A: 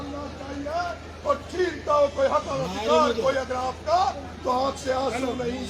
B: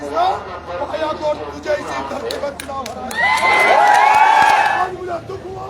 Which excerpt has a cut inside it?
B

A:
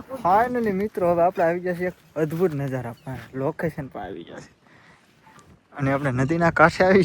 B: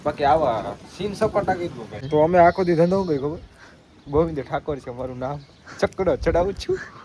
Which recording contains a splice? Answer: B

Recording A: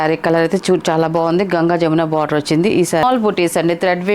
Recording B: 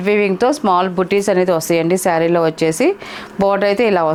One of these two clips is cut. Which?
A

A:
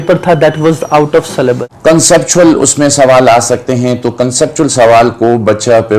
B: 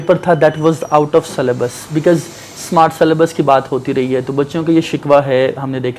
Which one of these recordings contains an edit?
A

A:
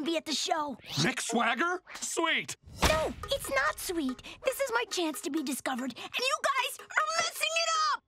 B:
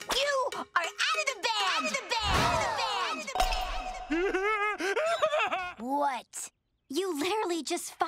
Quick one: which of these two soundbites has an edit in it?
B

